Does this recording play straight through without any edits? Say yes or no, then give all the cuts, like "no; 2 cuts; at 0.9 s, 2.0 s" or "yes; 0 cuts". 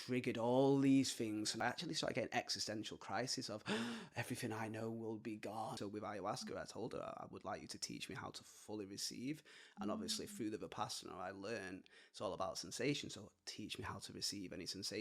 no; 2 cuts; at 1.5 s, 5.8 s